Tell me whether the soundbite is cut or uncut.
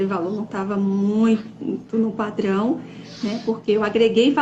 uncut